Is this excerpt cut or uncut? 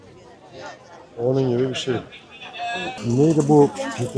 cut